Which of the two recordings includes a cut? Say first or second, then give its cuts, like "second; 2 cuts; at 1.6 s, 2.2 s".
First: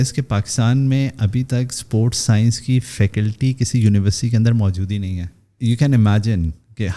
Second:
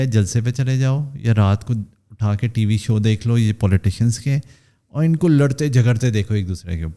first; 1 cut; at 5.5 s